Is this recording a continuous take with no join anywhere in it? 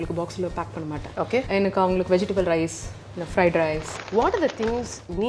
no; 2 cuts; at 1.5 s, 3.9 s

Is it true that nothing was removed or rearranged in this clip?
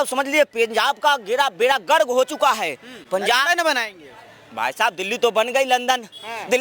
yes; 0 cuts

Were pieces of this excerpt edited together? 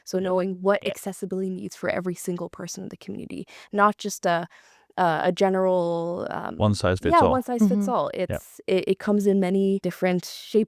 no; 0 cuts

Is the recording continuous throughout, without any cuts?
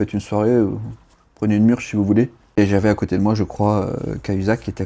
no; 1 cut; at 2.6 s

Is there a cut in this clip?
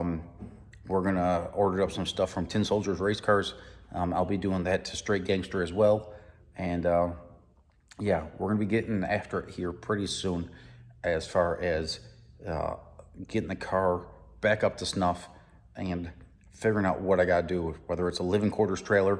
no; 0 cuts

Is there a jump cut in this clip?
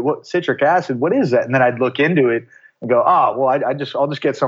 no; 0 cuts

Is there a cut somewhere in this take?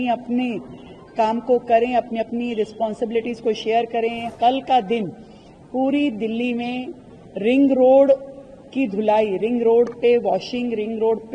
yes; 1 cut; at 4.3 s

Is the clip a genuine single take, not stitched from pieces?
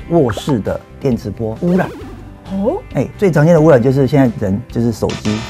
yes; 0 cuts

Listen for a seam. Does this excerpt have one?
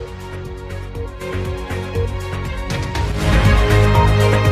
no; 0 cuts

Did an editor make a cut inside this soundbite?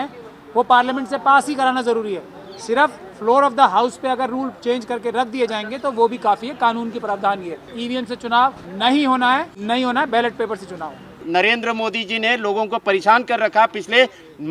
yes; 4 cuts; at 7.7 s, 8.7 s, 9.5 s, 11.2 s

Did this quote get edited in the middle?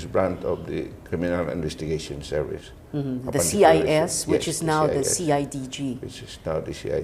yes; 1 cut; at 4.5 s

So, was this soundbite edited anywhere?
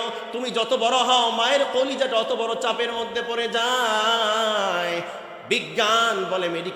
no; 0 cuts

